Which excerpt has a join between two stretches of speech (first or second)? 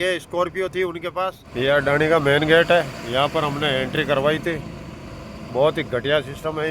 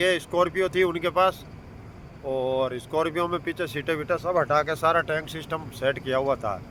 first